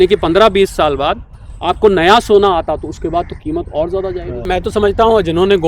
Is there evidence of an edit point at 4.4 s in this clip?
yes; 1 cut; at 4.4 s

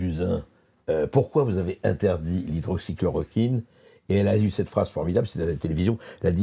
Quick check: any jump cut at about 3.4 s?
no; 0 cuts

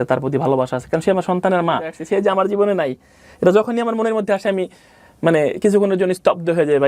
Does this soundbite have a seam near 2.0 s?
yes; 1 cut; at 2.0 s

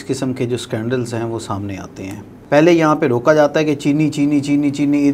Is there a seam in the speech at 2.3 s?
yes; 1 cut; at 2.3 s

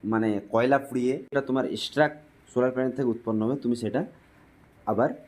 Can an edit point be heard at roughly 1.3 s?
yes; 1 cut; at 1.3 s

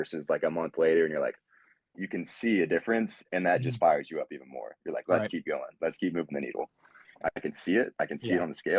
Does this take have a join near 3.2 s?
no; 3 cuts; at 2.0 s, 5.7 s, 7.2 s

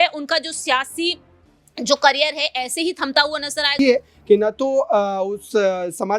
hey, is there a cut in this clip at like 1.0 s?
no; 1 cut; at 3.7 s

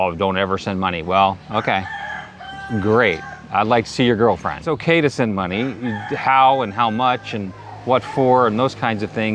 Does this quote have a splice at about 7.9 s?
no; 1 cut; at 4.8 s

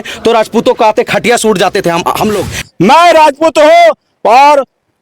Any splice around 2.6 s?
yes; 1 cut; at 2.6 s

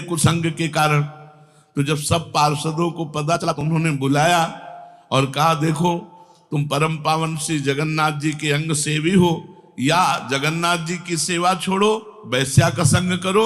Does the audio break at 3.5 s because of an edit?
yes; 1 cut; at 3.5 s

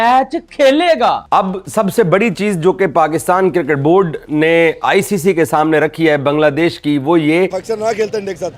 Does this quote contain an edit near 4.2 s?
no; 2 cuts; at 1.2 s, 7.6 s

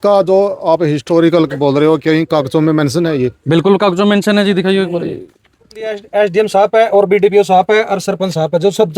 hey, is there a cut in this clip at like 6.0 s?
yes; 1 cut; at 6.0 s

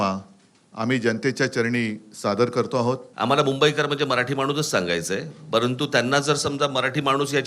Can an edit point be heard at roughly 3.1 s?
yes; 1 cut; at 3.1 s

